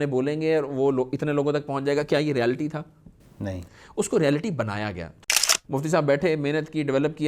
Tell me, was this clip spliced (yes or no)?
yes